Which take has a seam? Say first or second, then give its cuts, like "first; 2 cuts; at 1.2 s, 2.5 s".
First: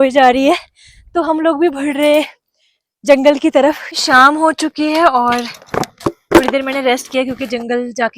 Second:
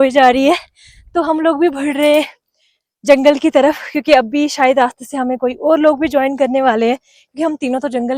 first; 1 cut; at 4.0 s